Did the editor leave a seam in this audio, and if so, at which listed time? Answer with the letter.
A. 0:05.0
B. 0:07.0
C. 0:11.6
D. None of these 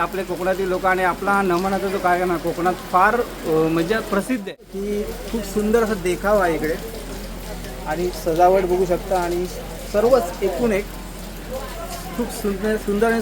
A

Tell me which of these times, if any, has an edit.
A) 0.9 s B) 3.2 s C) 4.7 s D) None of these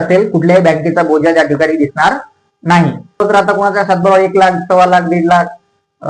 B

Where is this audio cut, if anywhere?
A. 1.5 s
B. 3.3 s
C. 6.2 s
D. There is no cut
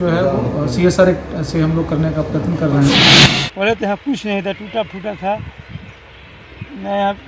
B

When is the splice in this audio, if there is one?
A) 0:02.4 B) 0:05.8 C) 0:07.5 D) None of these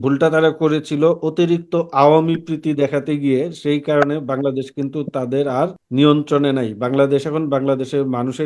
B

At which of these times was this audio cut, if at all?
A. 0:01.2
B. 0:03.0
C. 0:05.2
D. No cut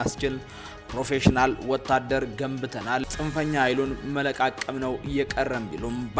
B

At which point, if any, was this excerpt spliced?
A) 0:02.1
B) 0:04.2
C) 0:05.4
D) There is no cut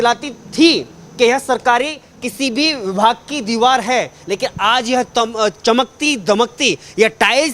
D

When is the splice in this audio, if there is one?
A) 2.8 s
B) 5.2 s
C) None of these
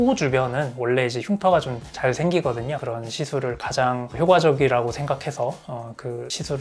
A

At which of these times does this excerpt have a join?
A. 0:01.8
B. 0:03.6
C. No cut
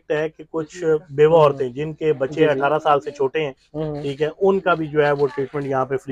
C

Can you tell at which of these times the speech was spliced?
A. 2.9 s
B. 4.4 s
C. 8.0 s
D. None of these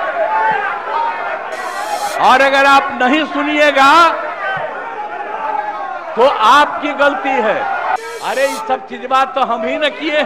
C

